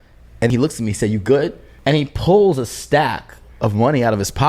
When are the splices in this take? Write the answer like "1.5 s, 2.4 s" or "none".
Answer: 1.6 s